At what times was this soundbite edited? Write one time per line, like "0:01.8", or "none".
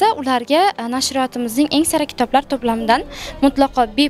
none